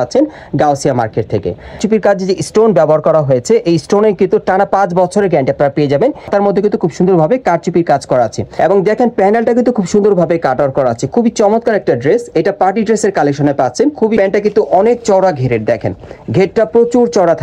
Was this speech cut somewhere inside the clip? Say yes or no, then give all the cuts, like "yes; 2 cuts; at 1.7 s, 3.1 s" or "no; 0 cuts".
yes; 4 cuts; at 1.8 s, 6.3 s, 8.4 s, 14.2 s